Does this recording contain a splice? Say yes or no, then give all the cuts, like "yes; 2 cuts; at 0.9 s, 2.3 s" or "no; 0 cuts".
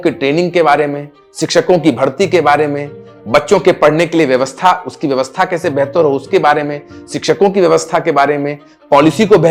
no; 0 cuts